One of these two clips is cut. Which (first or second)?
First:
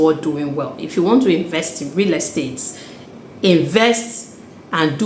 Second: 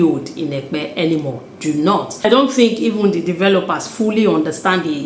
second